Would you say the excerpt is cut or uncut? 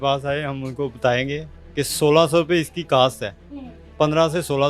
uncut